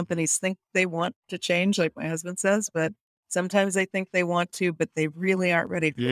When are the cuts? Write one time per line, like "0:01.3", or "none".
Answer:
none